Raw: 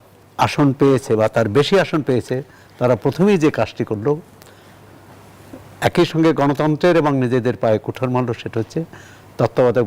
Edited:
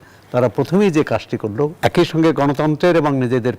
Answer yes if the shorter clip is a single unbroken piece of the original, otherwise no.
no